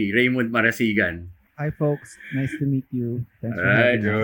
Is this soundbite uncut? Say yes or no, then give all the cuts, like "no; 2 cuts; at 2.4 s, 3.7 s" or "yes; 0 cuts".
no; 1 cut; at 1.4 s